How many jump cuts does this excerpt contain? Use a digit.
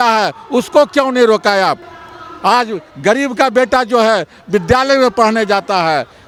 0